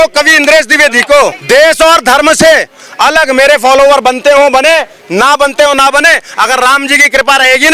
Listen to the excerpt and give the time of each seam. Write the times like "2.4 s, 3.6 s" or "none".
1.4 s

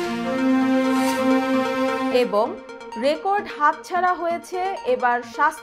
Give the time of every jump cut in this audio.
none

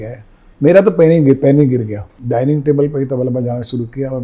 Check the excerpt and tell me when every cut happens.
2.1 s

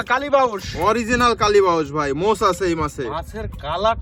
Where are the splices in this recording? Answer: none

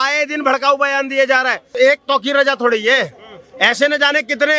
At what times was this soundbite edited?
1.7 s

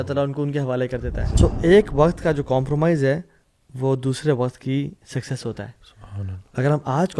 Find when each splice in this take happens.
1.2 s

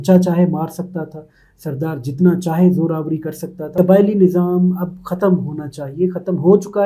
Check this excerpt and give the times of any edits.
3.7 s

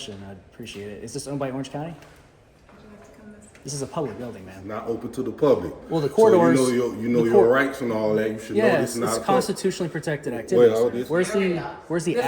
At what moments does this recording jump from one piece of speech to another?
4.7 s, 11.0 s

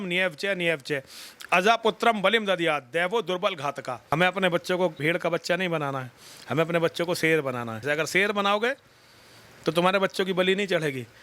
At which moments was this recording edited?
4.1 s, 5.0 s, 7.8 s

